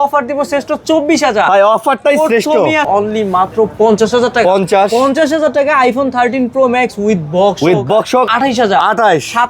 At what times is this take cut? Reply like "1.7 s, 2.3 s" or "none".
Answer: 2.9 s, 8.3 s